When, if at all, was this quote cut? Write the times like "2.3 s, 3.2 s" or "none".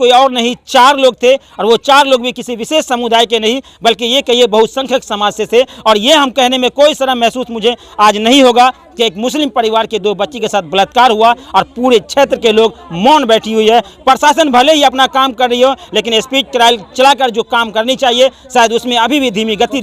none